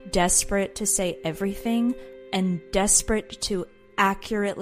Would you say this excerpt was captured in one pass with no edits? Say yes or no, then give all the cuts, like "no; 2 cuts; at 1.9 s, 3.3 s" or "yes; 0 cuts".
yes; 0 cuts